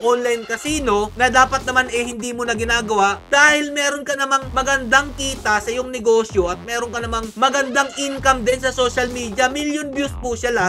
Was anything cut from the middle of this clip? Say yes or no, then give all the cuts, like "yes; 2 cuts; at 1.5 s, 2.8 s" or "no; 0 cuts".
no; 0 cuts